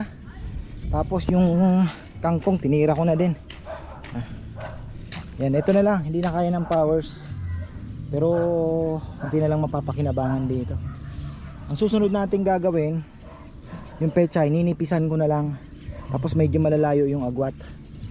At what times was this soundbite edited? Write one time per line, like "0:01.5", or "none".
none